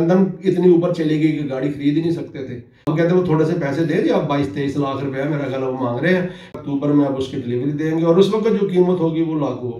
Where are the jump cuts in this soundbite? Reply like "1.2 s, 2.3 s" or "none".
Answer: 2.9 s, 6.6 s